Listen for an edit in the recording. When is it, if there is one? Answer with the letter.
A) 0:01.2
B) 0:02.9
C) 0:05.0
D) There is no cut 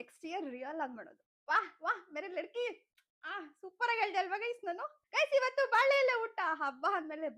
C